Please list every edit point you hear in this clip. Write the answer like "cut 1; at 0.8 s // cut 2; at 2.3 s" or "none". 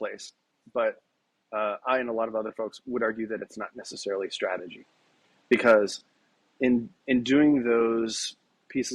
none